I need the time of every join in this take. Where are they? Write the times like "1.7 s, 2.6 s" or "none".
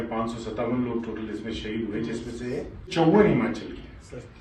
2.9 s